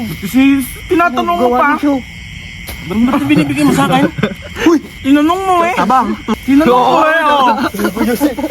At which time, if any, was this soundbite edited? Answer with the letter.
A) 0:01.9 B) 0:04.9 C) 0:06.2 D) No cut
C